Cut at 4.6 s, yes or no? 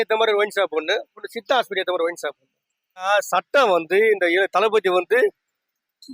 no